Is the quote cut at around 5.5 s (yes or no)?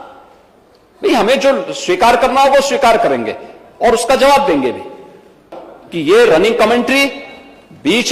yes